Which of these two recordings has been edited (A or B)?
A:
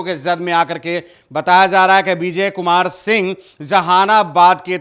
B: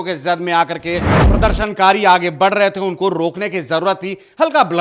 B